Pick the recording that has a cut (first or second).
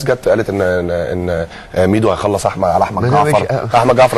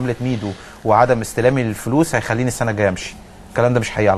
first